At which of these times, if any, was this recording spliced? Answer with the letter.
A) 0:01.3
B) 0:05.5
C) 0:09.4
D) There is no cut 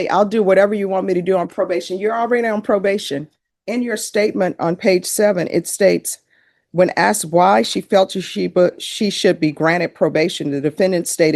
D